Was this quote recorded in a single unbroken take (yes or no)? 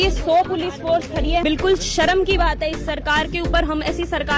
yes